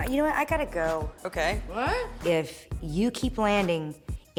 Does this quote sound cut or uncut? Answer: uncut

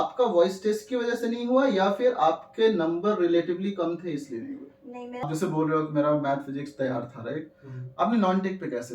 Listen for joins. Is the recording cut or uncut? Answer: cut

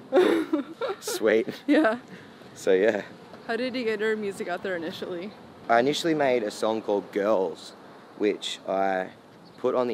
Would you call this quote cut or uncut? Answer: uncut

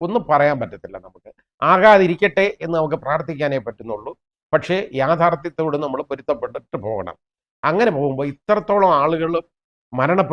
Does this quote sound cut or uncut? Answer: uncut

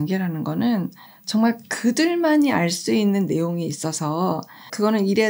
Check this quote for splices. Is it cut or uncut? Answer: uncut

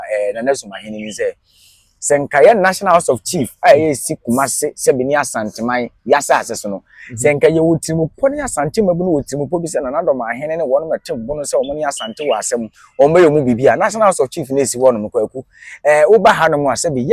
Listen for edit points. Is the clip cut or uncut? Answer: uncut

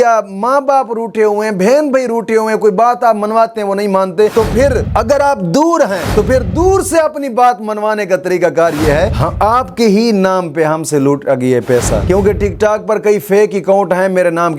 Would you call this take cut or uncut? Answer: cut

